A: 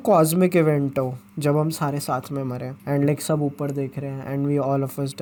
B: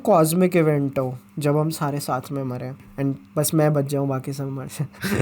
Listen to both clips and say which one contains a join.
B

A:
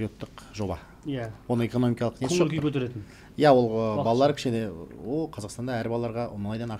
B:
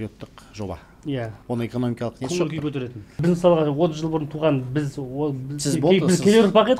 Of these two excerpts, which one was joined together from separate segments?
B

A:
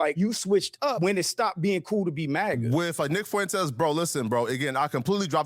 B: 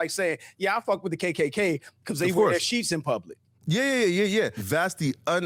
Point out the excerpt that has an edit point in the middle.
A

